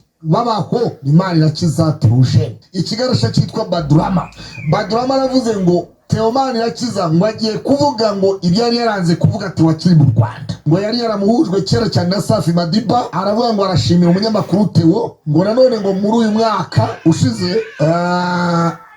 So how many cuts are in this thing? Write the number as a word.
zero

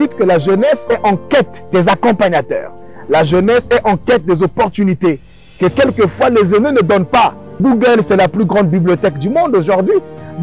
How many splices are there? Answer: two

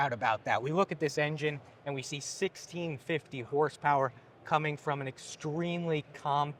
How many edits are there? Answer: zero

